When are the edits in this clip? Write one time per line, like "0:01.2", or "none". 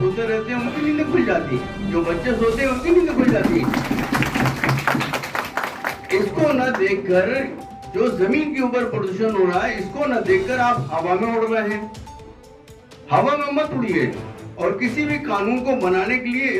none